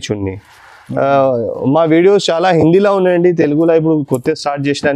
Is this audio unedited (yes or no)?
yes